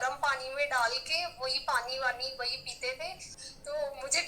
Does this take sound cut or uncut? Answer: cut